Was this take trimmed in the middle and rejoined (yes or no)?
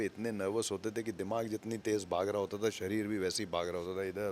no